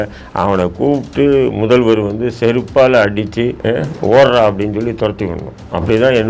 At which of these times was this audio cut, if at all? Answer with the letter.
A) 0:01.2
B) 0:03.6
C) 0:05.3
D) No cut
B